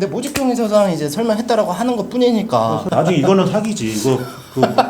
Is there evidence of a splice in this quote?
yes; 1 cut; at 2.8 s

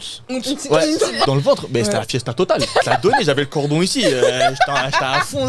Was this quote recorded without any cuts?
no; 2 cuts; at 1.3 s, 2.8 s

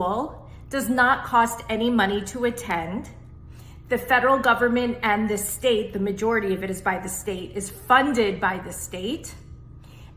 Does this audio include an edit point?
no; 0 cuts

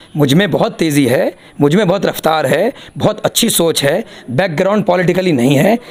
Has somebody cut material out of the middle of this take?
no; 0 cuts

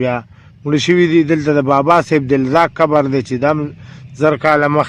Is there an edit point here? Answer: no; 0 cuts

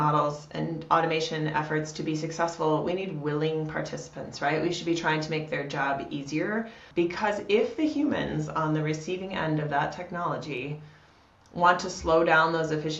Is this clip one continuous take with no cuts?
no; 1 cut; at 6.8 s

